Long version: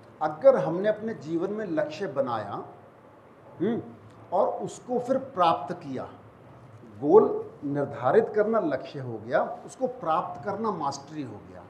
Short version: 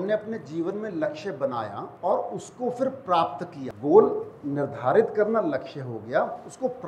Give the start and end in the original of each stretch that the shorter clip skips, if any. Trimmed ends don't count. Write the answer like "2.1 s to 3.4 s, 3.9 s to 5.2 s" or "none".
2.6 s to 4.1 s, 5.9 s to 6.8 s